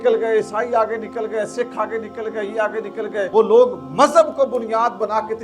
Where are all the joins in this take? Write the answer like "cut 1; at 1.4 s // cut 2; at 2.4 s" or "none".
cut 1; at 3.3 s